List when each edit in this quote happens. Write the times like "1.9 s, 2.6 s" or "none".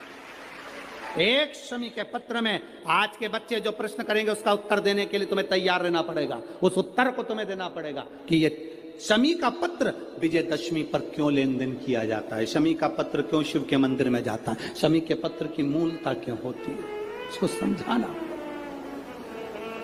none